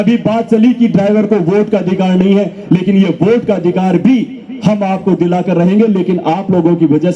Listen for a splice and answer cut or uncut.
uncut